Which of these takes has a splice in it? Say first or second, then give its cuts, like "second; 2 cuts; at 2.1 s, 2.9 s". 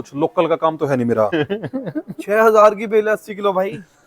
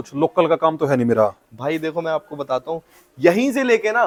first; 1 cut; at 1.3 s